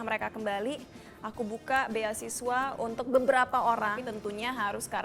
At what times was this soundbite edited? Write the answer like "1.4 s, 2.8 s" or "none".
4.1 s